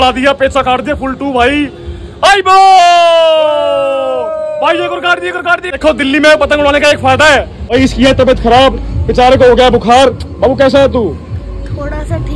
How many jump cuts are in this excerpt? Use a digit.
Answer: 3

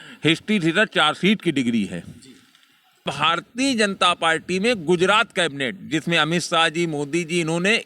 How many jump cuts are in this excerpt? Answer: 1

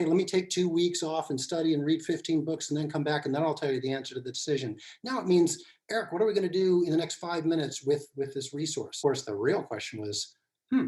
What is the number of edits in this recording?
1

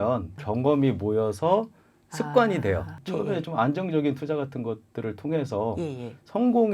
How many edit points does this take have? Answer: 1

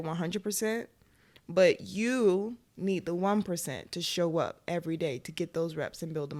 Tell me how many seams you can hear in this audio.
0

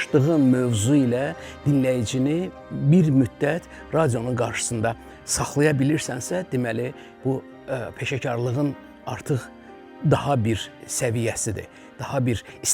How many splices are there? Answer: 0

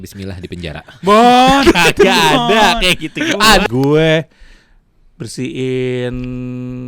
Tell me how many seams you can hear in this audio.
1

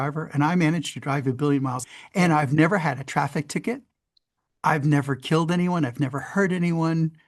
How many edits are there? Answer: 1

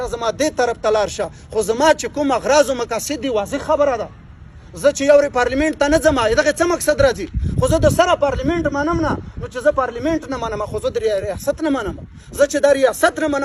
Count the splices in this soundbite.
0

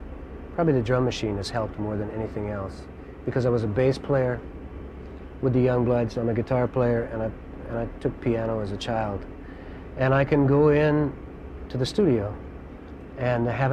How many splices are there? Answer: 1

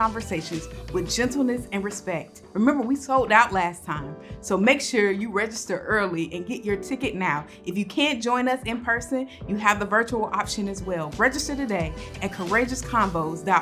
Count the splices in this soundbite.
1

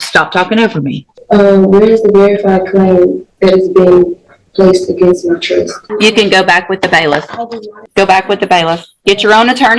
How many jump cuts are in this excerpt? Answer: 3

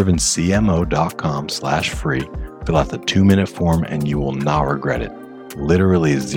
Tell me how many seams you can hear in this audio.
0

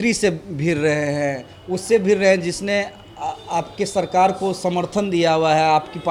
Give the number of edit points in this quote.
0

